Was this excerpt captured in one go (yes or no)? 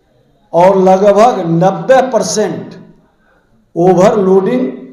yes